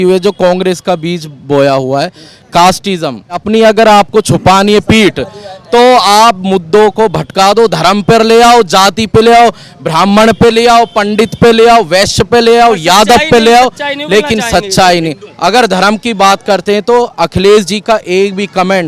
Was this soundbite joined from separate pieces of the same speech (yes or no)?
yes